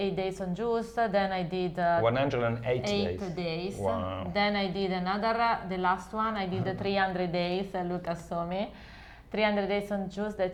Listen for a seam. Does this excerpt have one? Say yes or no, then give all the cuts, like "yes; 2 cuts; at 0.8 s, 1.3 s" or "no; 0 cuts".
no; 0 cuts